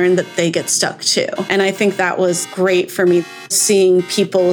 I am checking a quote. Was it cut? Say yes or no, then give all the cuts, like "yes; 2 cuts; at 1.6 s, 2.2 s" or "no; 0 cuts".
yes; 2 cuts; at 1.5 s, 3.5 s